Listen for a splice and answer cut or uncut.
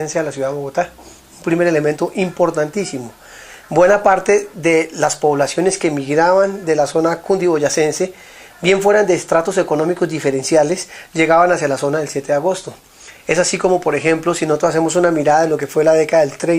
cut